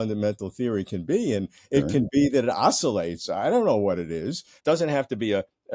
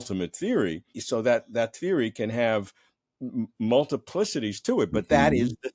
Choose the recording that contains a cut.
first; 1 cut; at 4.5 s

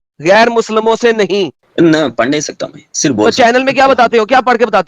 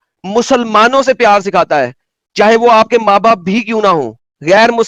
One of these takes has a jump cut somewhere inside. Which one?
first; 1 cut; at 1.6 s

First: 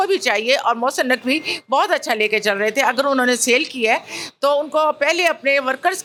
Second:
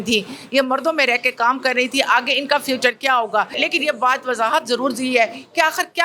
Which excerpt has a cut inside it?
second; 1 cut; at 3.6 s

